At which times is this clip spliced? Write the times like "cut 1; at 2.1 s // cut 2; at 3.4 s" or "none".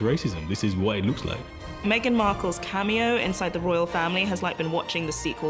cut 1; at 1.8 s